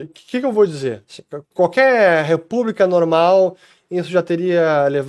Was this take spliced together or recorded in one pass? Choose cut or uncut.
uncut